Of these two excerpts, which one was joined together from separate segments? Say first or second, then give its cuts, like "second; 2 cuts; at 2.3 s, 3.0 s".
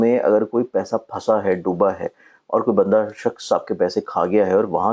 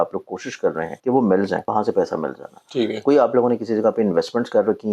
second; 2 cuts; at 0.9 s, 1.6 s